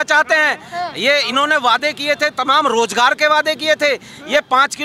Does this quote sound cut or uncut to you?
uncut